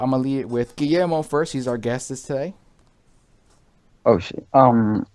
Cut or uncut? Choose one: uncut